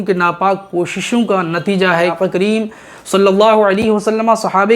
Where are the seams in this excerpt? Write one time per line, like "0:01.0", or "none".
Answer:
0:02.2